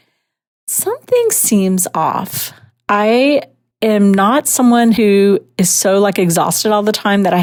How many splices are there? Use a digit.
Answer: 0